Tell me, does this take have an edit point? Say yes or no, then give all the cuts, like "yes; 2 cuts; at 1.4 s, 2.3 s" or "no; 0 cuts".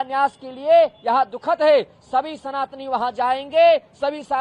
no; 0 cuts